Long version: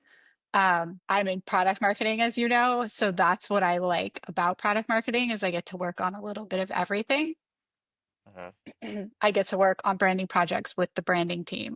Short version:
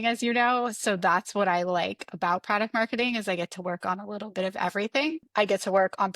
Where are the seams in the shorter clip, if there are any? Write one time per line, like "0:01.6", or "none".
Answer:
0:05.3